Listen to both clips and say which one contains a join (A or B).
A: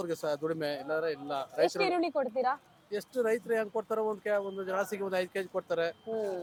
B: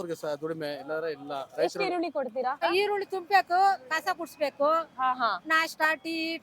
B